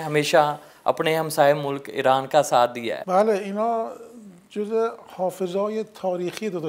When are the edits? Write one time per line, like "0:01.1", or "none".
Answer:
0:02.9